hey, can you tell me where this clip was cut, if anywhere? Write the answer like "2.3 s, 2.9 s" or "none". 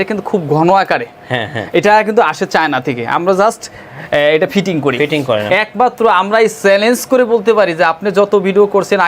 5.5 s

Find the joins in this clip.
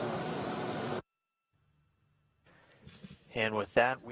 none

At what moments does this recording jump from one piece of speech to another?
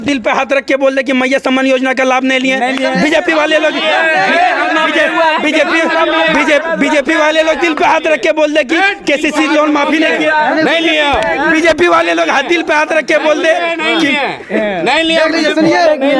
none

